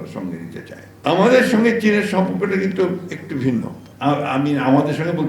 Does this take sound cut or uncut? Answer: cut